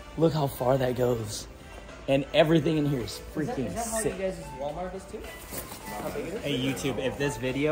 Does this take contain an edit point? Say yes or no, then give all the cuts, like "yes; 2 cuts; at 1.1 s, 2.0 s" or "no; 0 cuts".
no; 0 cuts